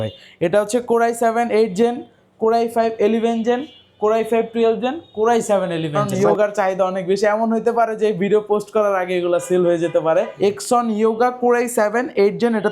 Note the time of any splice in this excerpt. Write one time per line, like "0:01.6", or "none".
0:06.0
0:10.3